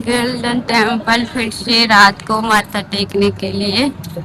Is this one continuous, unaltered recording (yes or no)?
yes